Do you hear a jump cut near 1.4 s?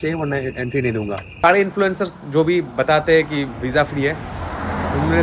yes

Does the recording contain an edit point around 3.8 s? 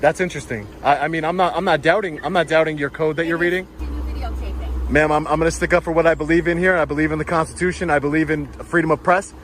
yes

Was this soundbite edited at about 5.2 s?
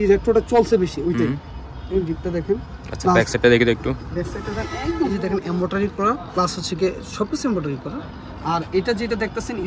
yes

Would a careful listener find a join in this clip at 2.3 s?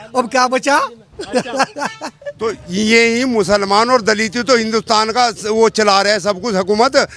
yes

